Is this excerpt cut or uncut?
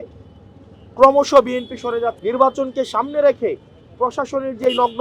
cut